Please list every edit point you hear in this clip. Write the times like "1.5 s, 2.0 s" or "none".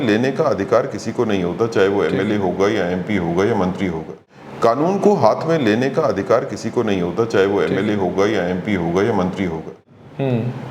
4.1 s, 9.8 s